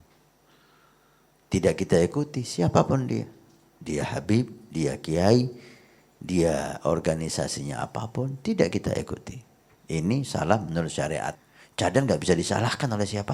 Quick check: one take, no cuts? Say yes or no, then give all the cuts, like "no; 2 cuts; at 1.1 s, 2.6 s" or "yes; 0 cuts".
no; 1 cut; at 11.3 s